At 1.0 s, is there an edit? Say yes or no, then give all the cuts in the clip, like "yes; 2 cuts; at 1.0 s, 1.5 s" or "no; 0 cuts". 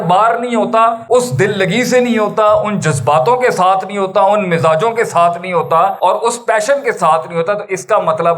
yes; 2 cuts; at 1.0 s, 5.9 s